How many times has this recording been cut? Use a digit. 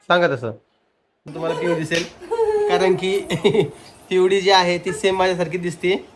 1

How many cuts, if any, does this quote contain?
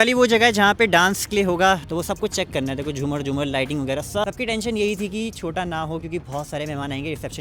2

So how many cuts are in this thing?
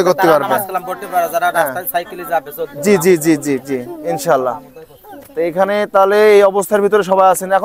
0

